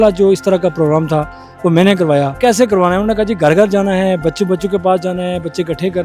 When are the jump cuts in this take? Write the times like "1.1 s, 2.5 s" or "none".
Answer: 2.4 s

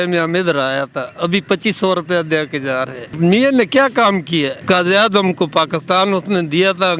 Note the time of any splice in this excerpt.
3.1 s, 4.6 s

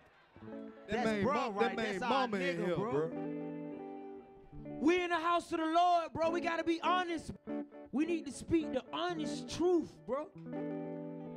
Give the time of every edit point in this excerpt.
7.3 s

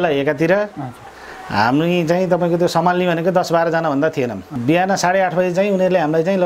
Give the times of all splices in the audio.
4.6 s

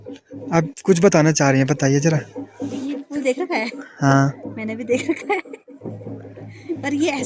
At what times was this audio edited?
none

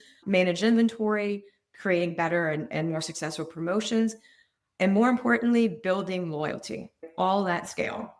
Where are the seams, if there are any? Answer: 7.0 s

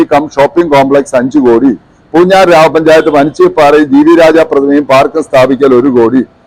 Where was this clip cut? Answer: none

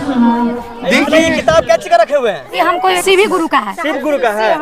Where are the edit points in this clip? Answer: 1.2 s, 3.0 s

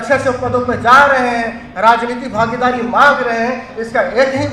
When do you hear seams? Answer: none

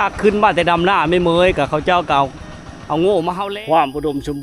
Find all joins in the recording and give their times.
3.4 s

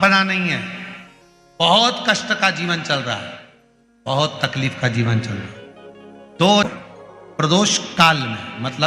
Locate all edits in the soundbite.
6.7 s

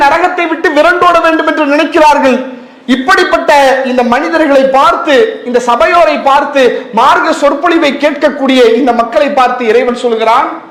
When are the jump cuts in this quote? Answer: none

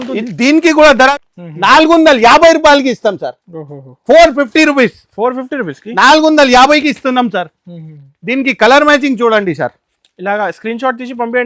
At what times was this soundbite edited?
1.1 s

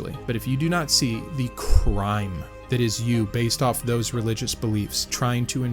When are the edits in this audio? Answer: 2.6 s

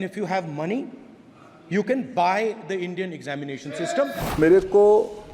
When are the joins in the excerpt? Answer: 4.2 s

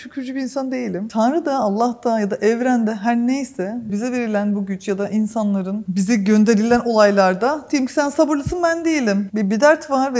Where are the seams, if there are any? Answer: 1.1 s, 3.9 s

